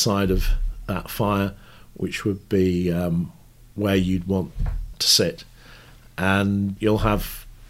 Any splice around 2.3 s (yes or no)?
no